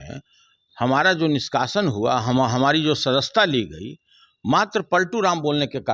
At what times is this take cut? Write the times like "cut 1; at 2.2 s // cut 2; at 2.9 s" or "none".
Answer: none